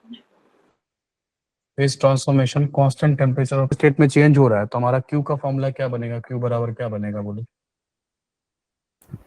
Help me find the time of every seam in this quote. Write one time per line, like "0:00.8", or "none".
0:03.7

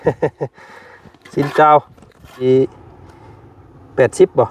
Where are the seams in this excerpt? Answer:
0:02.4

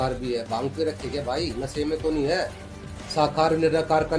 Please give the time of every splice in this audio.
none

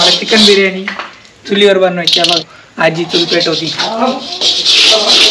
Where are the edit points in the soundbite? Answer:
0:02.4

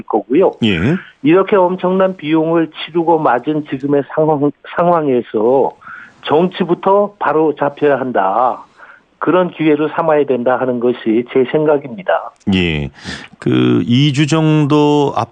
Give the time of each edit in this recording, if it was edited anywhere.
0:09.9

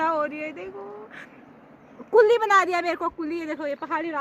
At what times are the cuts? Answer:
none

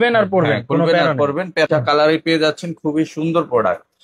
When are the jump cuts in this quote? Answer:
0:01.7

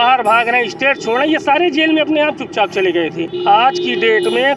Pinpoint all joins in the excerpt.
none

